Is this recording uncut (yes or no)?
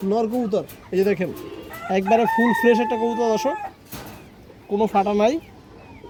yes